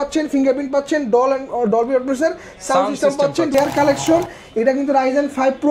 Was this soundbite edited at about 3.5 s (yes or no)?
yes